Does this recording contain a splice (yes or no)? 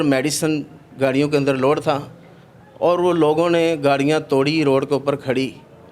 no